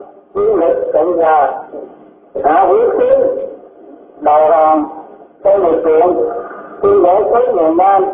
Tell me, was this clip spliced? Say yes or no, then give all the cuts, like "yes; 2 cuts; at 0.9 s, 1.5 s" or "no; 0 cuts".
no; 0 cuts